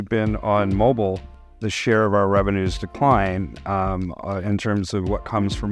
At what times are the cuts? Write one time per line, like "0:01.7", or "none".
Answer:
0:01.4